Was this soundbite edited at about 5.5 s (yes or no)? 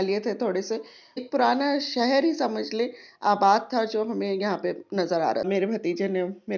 yes